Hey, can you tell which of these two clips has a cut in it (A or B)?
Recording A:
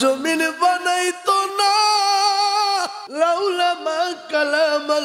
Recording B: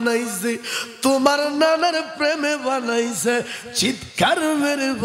A